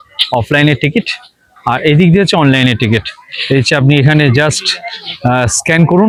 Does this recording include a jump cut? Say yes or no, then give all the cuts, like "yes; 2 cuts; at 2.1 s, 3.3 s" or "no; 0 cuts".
no; 0 cuts